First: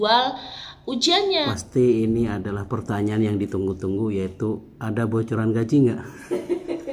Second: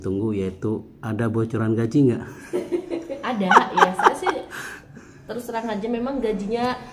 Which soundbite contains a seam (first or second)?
first